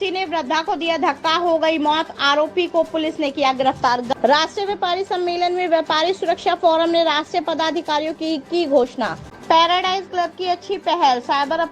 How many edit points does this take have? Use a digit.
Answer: 2